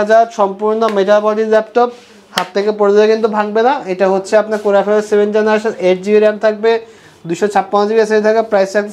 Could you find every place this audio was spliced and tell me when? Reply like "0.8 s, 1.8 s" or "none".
none